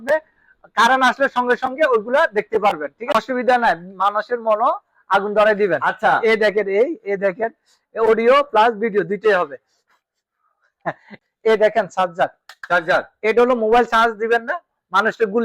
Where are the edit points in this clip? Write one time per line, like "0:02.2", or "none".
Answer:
0:03.1
0:11.2